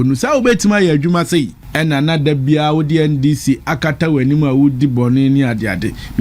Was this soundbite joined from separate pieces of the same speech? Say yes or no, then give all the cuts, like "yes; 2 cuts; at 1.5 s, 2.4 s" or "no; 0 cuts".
yes; 1 cut; at 1.6 s